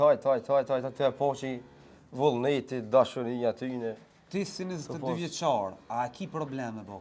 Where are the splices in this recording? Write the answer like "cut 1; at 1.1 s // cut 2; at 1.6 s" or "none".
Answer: none